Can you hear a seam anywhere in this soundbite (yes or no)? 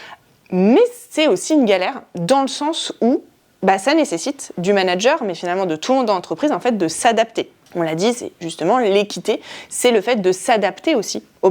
no